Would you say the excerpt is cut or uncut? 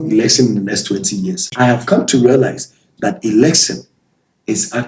cut